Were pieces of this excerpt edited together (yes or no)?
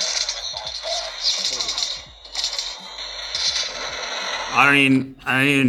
no